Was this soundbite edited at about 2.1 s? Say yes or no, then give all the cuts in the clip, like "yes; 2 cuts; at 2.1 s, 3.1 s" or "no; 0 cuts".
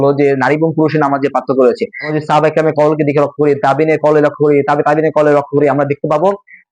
yes; 1 cut; at 2.1 s